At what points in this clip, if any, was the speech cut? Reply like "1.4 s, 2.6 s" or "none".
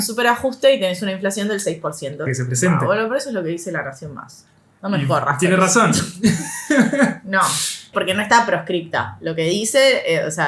2.3 s, 7.9 s